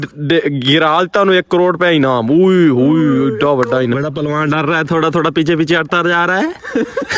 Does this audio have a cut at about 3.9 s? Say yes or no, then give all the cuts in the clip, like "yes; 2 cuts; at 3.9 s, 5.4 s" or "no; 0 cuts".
yes; 1 cut; at 3.9 s